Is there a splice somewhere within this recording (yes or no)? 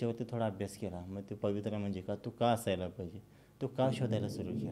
no